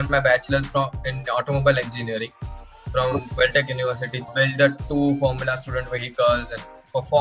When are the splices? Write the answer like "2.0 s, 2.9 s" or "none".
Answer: 4.3 s